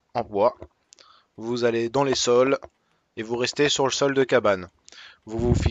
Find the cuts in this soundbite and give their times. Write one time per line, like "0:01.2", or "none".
0:04.8